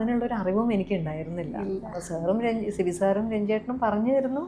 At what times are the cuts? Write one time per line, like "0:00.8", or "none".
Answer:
none